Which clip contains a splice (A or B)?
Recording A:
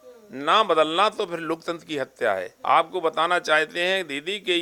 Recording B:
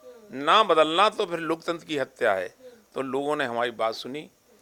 A